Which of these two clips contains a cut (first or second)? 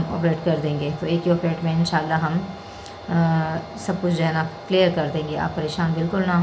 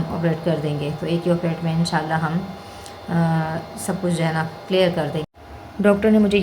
second